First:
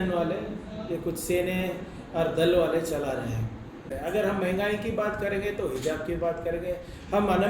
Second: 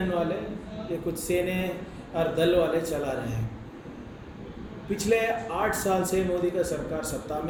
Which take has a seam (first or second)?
first